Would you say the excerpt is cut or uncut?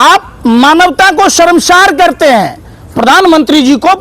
uncut